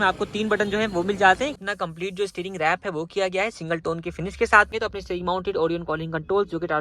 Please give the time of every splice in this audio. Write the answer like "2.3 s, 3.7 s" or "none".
1.5 s, 4.7 s